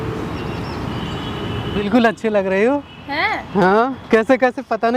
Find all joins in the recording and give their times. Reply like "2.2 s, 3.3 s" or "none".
1.7 s